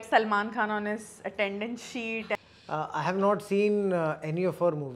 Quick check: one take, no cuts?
no; 1 cut; at 2.4 s

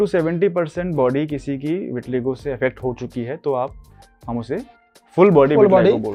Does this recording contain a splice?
no; 0 cuts

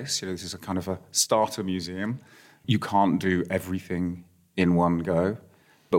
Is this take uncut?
yes; 0 cuts

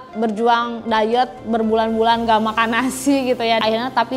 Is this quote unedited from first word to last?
yes; 0 cuts

